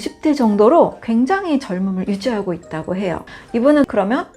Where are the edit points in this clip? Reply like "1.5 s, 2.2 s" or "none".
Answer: 3.2 s

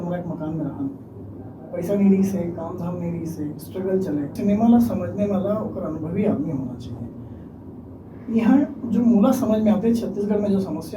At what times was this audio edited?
4.3 s

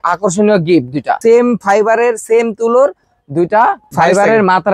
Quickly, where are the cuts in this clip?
1.2 s, 3.9 s

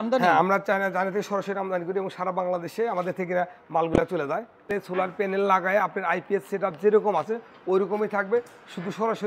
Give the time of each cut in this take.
4.7 s

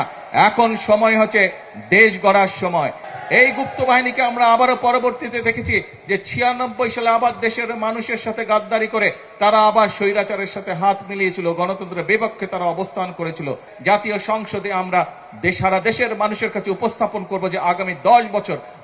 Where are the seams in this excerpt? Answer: 3.0 s, 13.7 s

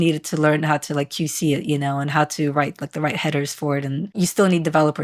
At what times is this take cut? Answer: none

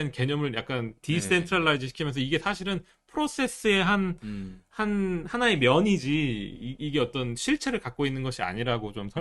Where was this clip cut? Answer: none

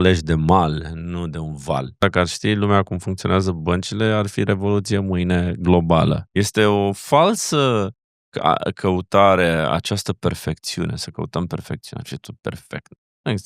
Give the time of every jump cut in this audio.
2.0 s, 6.2 s

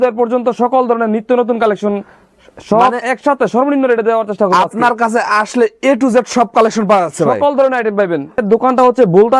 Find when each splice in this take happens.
8.4 s

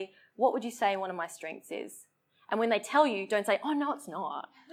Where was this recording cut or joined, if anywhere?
none

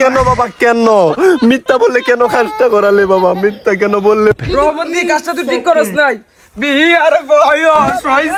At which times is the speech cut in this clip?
none

